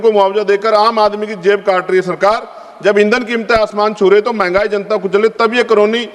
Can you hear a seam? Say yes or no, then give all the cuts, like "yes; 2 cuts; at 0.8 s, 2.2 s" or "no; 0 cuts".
no; 0 cuts